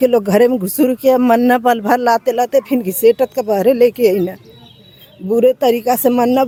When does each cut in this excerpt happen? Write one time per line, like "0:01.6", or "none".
none